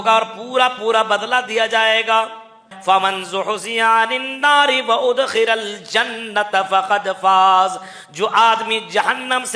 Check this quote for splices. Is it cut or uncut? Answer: cut